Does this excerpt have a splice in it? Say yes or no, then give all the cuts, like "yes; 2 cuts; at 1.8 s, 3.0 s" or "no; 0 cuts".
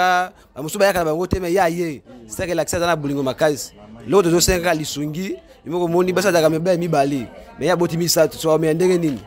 no; 0 cuts